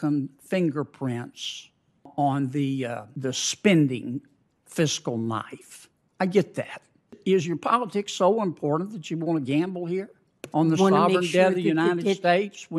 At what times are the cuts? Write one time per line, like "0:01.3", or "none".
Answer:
0:02.1
0:07.1